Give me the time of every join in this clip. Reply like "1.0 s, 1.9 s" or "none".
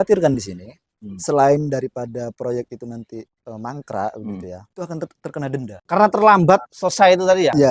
4.6 s, 5.8 s, 6.7 s